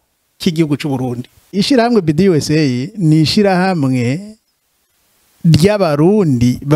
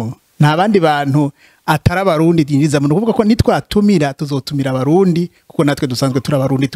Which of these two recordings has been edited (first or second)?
first